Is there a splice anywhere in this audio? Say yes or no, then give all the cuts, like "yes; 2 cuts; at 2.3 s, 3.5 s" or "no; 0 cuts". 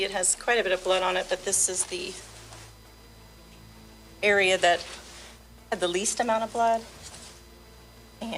no; 0 cuts